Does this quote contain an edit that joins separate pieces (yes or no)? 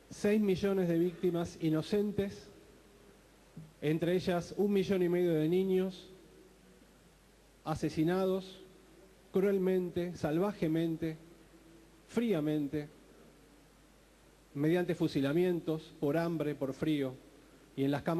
yes